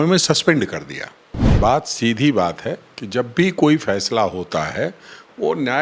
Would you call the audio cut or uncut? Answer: cut